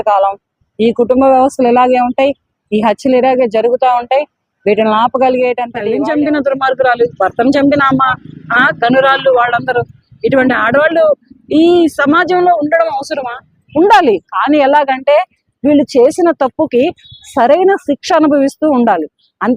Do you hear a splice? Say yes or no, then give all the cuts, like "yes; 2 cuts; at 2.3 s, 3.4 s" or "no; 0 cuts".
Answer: yes; 1 cut; at 5.8 s